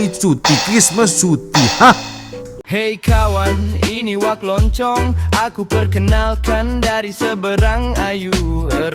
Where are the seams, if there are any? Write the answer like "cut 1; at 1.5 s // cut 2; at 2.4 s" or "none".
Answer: cut 1; at 2.5 s